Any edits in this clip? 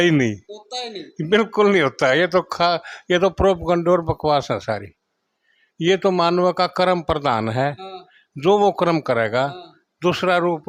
no; 0 cuts

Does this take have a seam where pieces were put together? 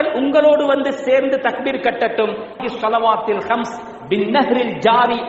yes; 1 cut; at 2.5 s

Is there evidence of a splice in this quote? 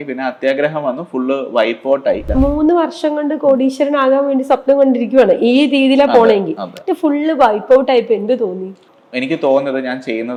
no; 0 cuts

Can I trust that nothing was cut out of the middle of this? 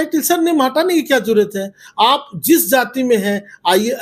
yes; 0 cuts

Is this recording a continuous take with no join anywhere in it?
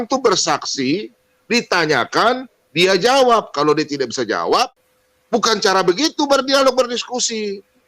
no; 1 cut; at 4.8 s

